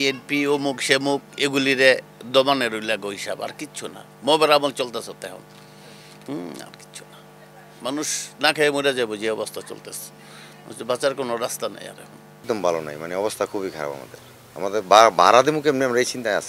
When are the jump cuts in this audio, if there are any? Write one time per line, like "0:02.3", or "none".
0:12.4